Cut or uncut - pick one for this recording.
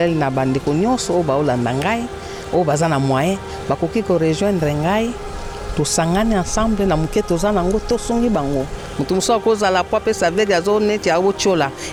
uncut